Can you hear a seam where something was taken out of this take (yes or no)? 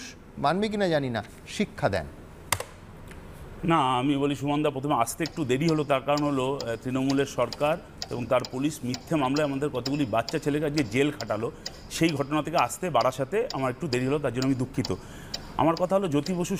no